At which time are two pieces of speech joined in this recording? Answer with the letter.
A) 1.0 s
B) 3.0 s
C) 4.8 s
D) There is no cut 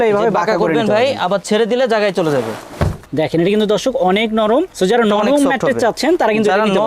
B